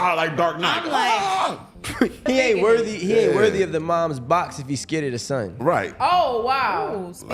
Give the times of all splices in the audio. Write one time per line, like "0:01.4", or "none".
0:02.2